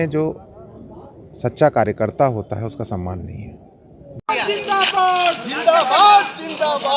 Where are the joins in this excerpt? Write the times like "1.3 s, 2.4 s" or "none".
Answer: 4.2 s